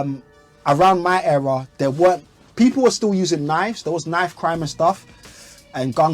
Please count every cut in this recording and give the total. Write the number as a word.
zero